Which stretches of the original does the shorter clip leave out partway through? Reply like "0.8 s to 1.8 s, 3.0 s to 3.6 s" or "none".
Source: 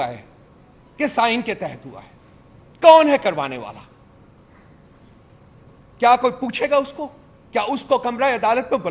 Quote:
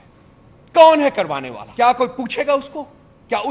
3.6 s to 5.8 s